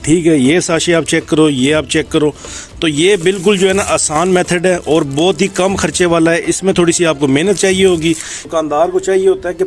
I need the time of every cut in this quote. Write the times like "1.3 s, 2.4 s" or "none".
8.3 s